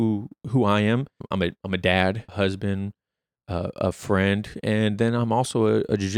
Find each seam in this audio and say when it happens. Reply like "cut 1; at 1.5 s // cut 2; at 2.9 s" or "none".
cut 1; at 1.2 s // cut 2; at 2.3 s